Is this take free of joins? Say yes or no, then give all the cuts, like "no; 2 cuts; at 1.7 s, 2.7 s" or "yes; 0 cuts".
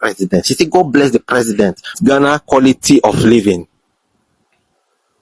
no; 1 cut; at 2.0 s